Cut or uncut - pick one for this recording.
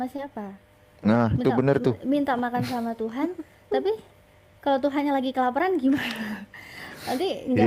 uncut